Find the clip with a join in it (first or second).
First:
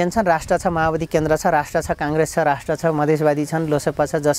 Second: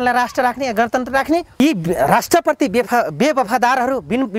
second